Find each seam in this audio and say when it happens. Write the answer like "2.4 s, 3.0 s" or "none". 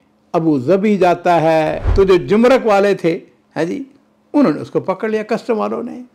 1.8 s